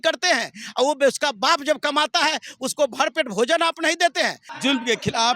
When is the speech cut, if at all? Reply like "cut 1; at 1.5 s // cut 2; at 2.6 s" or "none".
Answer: cut 1; at 4.4 s